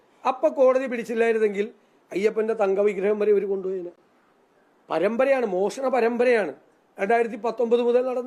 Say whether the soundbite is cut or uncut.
uncut